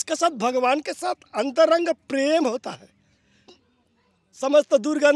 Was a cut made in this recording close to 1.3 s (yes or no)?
no